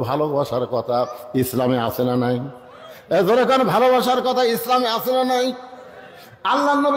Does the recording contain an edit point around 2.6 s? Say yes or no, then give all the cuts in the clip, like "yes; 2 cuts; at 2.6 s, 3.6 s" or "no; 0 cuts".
no; 0 cuts